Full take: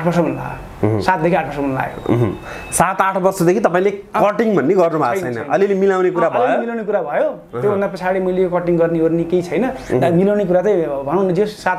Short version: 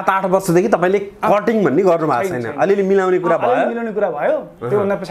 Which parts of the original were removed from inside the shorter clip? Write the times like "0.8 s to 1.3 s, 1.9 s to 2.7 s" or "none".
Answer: none